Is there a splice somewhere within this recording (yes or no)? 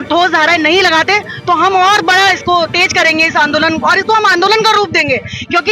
no